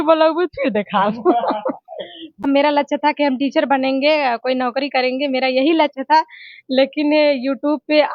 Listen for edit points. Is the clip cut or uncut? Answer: cut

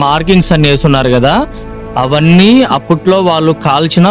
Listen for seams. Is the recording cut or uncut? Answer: uncut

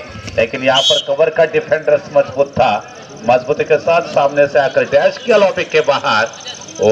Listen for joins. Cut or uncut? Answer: uncut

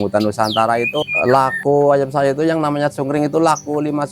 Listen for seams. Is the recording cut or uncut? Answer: cut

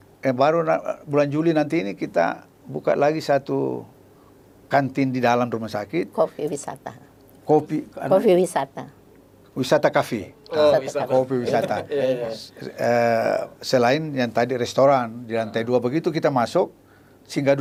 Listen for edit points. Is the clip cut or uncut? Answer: uncut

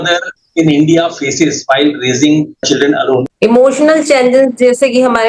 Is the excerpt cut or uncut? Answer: cut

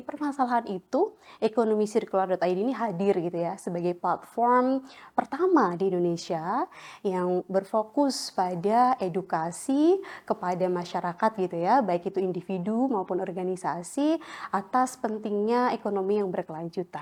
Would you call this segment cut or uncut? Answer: uncut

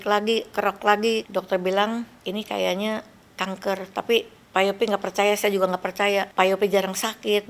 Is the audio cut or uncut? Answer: cut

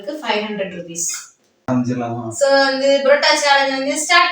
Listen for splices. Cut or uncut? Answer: cut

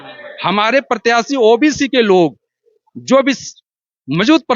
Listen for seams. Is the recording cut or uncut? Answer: uncut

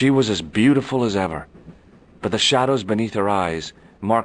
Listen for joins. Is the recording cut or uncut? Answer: uncut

